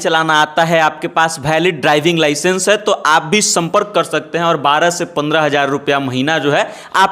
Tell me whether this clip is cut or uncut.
uncut